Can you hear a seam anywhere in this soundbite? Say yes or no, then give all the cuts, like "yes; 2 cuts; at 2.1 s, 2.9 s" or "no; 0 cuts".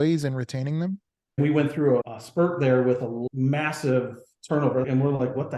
yes; 4 cuts; at 1.4 s, 2.2 s, 3.3 s, 4.8 s